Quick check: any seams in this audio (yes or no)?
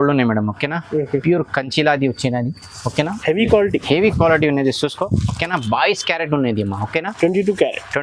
no